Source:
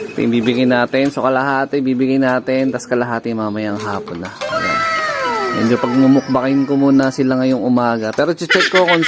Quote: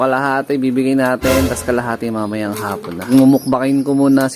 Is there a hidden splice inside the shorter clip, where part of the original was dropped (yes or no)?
yes